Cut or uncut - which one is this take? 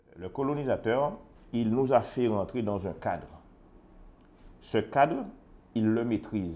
cut